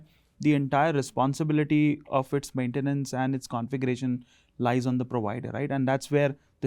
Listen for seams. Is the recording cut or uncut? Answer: uncut